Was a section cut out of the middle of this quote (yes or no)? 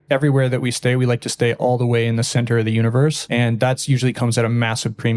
no